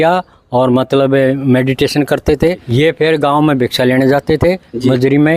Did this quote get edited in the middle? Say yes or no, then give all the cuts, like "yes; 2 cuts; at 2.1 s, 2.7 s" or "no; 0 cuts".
yes; 1 cut; at 2.7 s